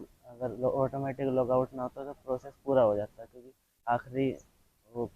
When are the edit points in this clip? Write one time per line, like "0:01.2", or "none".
none